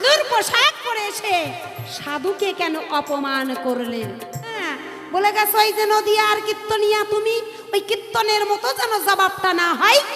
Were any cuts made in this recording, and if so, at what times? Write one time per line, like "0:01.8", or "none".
0:04.5